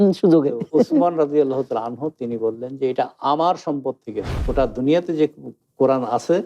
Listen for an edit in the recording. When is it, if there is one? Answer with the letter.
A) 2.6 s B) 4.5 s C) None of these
B